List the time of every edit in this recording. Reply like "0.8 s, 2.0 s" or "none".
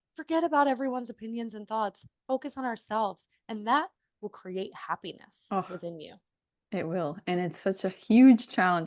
none